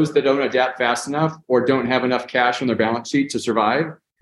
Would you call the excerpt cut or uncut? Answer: uncut